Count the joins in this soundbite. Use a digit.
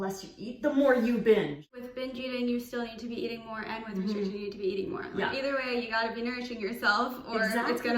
1